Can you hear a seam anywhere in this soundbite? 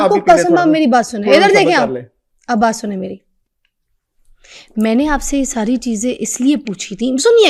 no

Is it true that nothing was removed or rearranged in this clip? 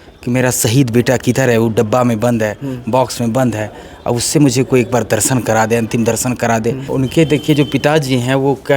no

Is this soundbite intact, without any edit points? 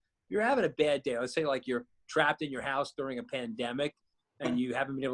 yes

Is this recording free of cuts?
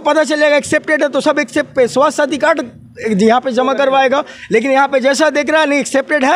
yes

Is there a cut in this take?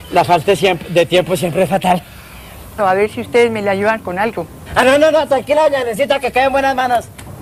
no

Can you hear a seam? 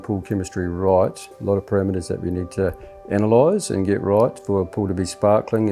yes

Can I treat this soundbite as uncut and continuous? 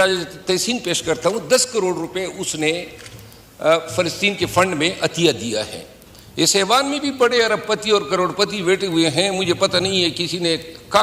yes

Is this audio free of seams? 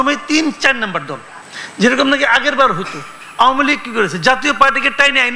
yes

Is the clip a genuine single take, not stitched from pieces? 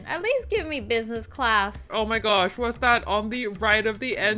no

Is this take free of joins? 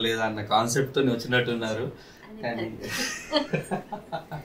yes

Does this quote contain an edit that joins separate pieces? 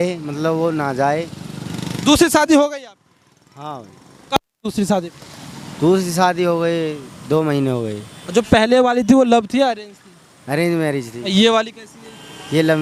no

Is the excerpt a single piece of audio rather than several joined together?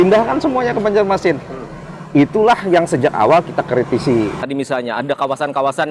no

